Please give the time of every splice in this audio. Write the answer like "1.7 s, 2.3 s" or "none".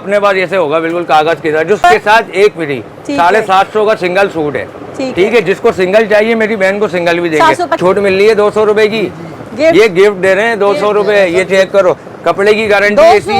1.8 s, 7.8 s